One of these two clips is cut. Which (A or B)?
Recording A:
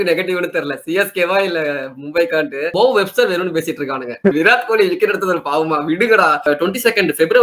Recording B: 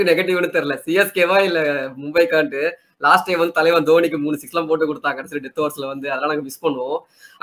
A